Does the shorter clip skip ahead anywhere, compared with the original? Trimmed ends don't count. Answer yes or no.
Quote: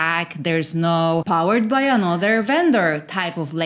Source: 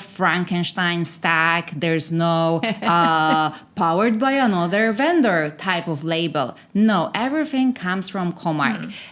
yes